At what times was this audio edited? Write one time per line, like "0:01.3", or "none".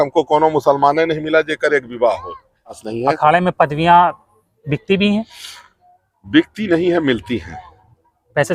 0:02.9